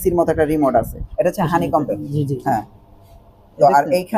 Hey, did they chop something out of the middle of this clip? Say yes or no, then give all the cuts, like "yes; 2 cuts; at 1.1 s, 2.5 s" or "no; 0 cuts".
yes; 1 cut; at 1.0 s